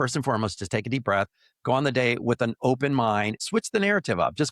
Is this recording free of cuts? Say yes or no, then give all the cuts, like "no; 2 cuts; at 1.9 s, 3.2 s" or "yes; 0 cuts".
no; 1 cut; at 3.4 s